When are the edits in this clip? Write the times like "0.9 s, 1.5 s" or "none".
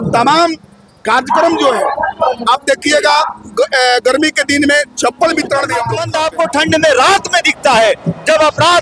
6.0 s